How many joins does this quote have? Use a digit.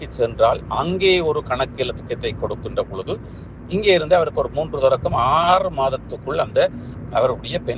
0